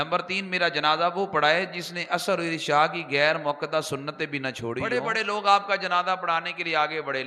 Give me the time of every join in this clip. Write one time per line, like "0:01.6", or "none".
0:04.8